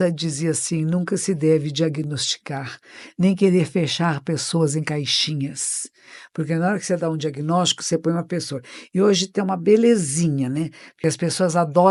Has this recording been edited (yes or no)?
no